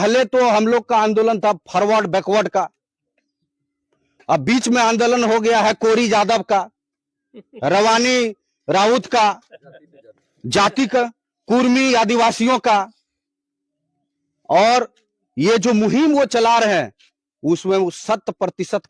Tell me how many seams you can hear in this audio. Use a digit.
0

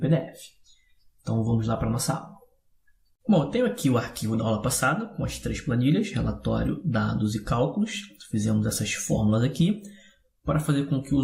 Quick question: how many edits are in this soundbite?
1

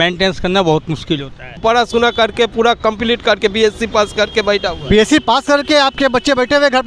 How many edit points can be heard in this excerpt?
1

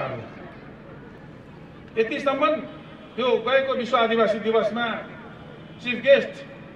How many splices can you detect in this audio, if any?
1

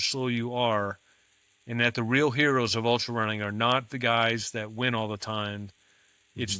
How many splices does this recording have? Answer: 0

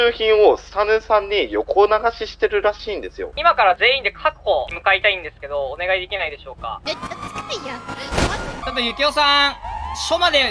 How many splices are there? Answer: 4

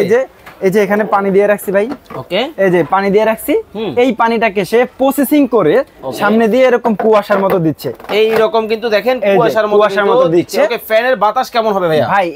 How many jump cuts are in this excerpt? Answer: 0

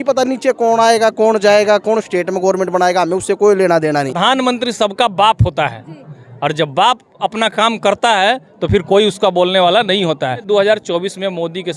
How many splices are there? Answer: 2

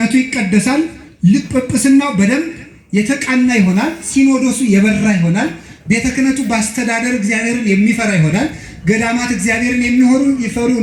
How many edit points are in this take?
0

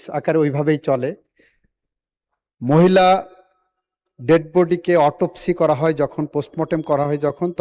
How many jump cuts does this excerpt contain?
0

